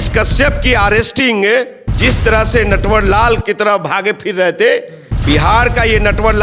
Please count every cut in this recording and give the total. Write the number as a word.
one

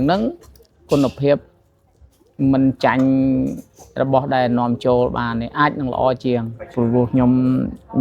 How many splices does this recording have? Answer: one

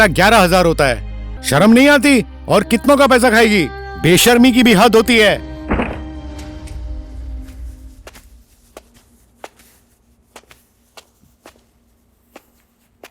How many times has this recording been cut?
one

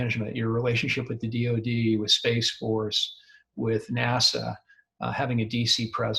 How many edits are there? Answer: zero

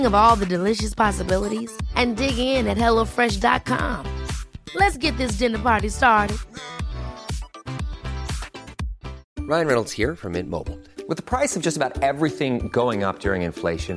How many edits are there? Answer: one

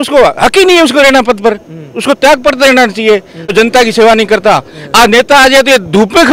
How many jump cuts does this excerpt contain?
one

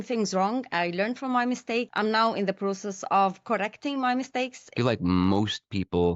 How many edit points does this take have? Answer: two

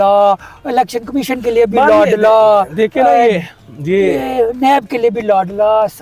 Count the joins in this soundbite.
zero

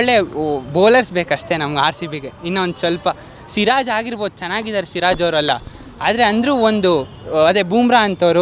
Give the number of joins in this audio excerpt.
zero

